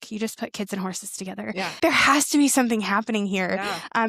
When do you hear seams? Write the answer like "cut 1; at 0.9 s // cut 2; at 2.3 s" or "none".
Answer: cut 1; at 1.8 s